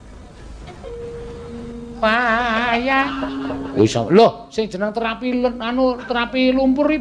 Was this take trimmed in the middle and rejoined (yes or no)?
yes